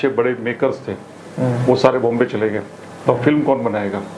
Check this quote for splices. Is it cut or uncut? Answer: uncut